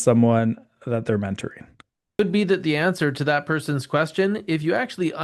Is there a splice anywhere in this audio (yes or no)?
yes